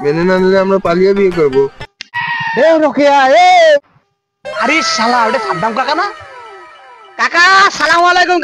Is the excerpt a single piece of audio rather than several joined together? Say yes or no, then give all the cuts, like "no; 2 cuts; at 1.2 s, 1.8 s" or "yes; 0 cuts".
no; 2 cuts; at 2.1 s, 3.9 s